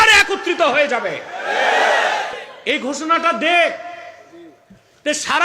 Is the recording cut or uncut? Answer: cut